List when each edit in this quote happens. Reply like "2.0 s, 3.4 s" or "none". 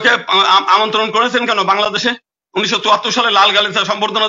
none

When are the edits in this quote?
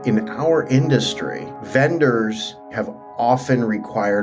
2.7 s

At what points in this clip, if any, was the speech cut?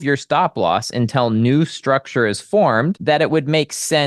3.0 s

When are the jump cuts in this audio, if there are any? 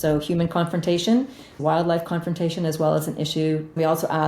1.5 s

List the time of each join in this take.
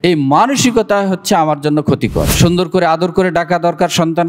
2.3 s

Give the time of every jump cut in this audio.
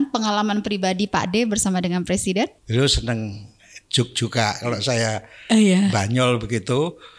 2.6 s

